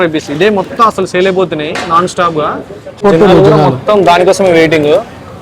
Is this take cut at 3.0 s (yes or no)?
yes